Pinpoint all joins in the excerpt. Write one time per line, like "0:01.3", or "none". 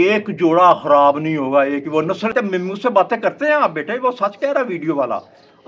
0:02.3